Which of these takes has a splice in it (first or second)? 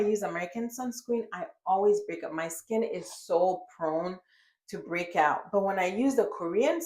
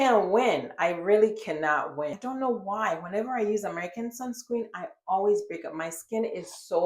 second